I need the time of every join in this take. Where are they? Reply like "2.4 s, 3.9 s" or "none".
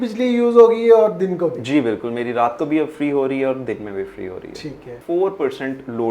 5.0 s